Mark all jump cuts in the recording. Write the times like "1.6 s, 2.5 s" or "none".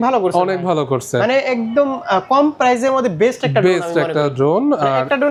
none